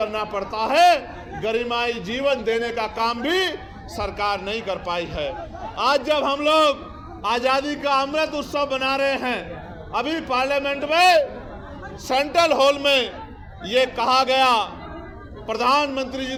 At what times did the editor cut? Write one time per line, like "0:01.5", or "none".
none